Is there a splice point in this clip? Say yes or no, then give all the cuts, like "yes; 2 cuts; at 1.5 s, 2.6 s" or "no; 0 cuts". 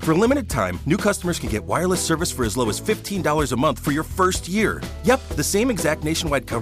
no; 0 cuts